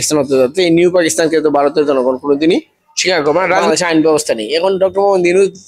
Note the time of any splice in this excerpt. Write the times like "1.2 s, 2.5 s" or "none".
3.6 s